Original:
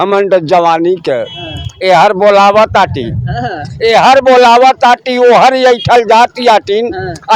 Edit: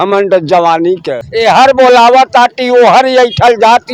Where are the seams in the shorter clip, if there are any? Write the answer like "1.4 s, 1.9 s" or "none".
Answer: 1.2 s